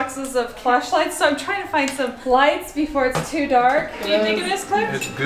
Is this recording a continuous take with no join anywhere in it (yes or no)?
no